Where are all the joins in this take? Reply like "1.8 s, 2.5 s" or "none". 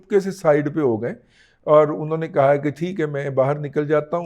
none